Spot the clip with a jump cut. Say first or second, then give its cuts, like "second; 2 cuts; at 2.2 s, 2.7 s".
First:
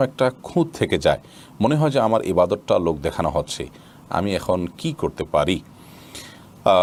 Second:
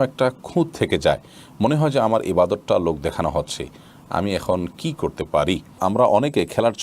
second; 1 cut; at 5.7 s